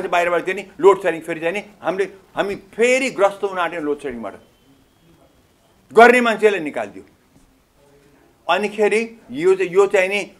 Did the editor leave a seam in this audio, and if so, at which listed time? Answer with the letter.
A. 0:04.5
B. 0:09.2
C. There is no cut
C